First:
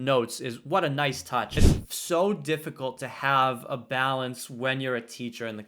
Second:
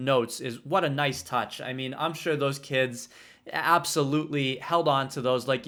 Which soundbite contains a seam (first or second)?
first